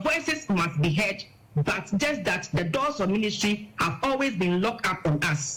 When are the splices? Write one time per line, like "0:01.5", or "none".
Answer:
none